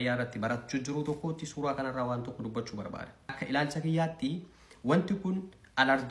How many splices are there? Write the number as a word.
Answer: one